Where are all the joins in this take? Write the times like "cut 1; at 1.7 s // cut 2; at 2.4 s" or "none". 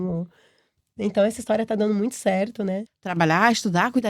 cut 1; at 2.9 s